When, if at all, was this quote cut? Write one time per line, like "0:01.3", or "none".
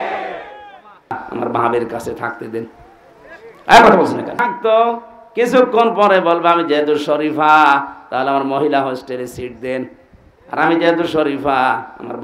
0:01.1
0:04.4